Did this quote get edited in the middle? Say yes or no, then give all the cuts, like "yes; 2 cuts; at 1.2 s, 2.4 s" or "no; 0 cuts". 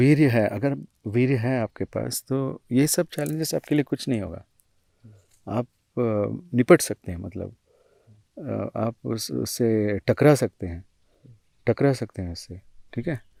no; 0 cuts